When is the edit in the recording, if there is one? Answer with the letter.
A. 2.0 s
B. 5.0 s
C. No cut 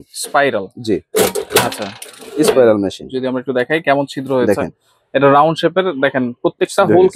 C